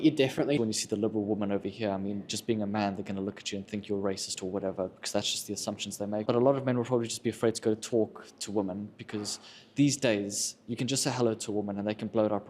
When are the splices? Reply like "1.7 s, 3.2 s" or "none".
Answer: 6.2 s